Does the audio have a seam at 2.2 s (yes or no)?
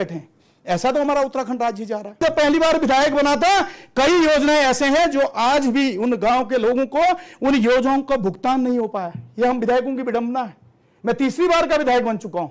yes